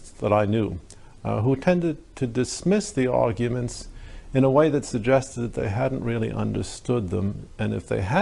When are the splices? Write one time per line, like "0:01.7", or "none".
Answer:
0:02.7

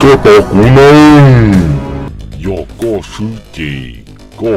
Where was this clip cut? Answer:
0:02.1

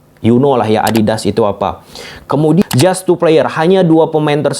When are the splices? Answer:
0:02.6

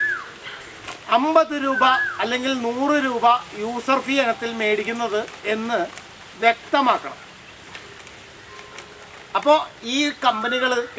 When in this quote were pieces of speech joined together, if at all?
none

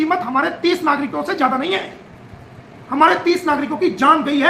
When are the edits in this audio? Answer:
none

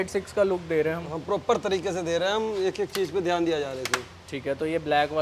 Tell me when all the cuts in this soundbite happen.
none

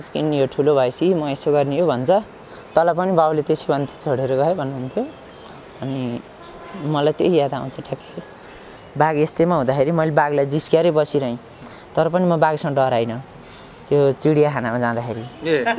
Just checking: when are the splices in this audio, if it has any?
0:08.8

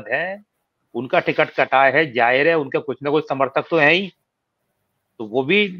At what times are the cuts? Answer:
none

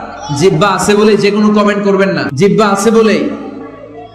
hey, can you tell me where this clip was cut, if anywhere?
0:02.3

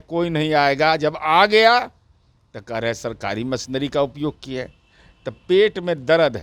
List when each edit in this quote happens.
none

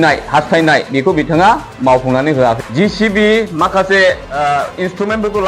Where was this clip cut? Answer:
0:02.6
0:04.3

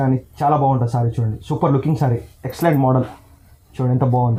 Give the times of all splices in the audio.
none

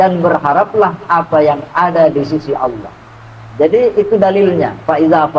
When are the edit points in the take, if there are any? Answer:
none

